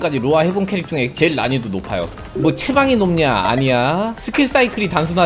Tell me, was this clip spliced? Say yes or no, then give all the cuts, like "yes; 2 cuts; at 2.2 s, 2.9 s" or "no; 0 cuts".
yes; 1 cut; at 4.2 s